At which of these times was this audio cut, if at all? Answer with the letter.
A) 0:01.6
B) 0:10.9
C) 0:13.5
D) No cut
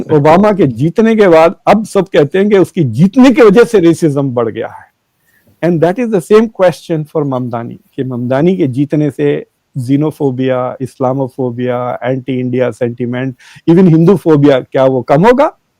D